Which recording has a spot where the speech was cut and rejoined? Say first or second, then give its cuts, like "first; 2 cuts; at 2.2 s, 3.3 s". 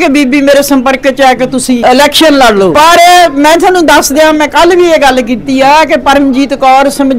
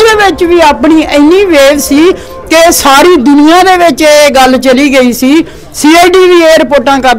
first; 2 cuts; at 1.8 s, 2.7 s